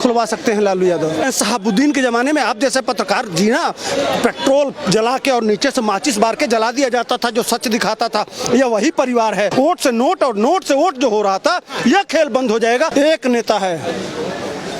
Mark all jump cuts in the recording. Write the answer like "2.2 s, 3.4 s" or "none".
1.2 s, 9.5 s, 12.9 s

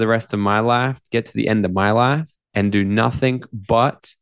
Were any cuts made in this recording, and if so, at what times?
2.4 s

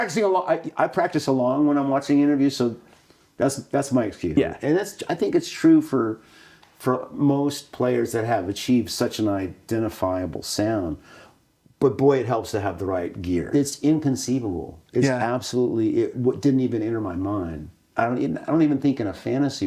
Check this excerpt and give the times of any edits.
4.4 s, 13.5 s

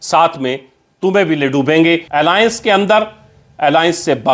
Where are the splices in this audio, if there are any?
2.0 s

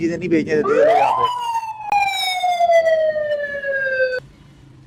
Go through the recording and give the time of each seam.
none

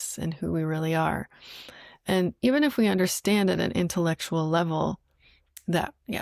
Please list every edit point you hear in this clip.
none

